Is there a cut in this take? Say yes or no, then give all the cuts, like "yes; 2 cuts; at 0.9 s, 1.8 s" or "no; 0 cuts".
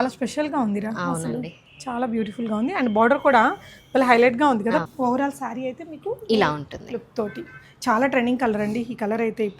yes; 1 cut; at 4.8 s